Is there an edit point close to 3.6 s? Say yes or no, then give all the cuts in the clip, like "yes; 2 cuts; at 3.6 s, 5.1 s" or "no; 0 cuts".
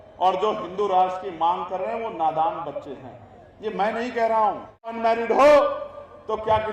no; 1 cut; at 4.9 s